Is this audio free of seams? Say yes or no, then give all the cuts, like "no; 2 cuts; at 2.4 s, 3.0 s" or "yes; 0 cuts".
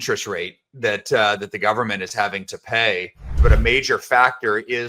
no; 1 cut; at 3.2 s